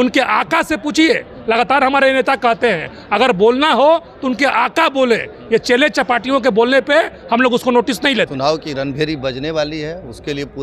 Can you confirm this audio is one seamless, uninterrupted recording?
no; 1 cut; at 8.3 s

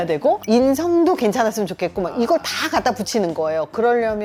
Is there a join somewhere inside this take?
no; 0 cuts

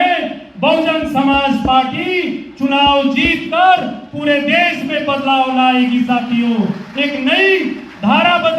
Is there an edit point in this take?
no; 0 cuts

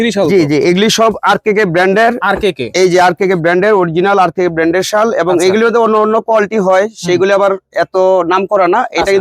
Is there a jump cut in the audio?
no; 0 cuts

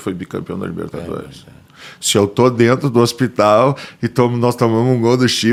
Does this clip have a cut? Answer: no; 0 cuts

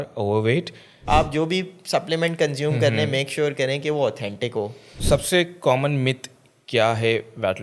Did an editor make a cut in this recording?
yes; 2 cuts; at 1.0 s, 4.9 s

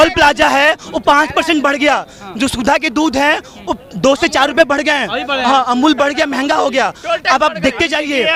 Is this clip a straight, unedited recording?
yes; 0 cuts

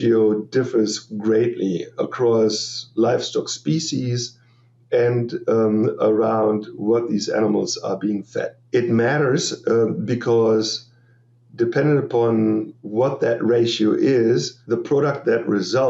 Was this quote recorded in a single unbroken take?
no; 3 cuts; at 8.6 s, 12.8 s, 14.5 s

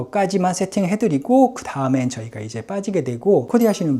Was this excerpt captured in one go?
yes; 0 cuts

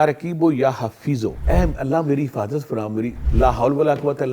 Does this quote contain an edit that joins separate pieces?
yes; 2 cuts; at 1.4 s, 3.2 s

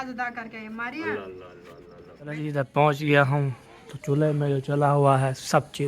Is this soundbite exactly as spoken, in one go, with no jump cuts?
no; 1 cut; at 2.3 s

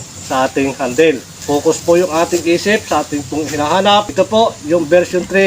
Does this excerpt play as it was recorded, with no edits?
no; 2 cuts; at 1.3 s, 4.1 s

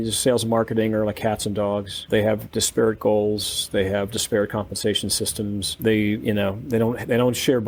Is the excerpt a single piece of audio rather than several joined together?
yes; 0 cuts

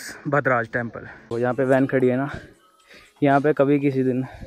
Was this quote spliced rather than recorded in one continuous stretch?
yes; 1 cut; at 1.1 s

